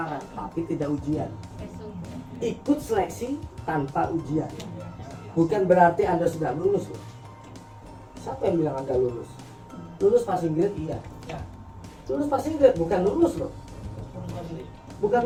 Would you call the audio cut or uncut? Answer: uncut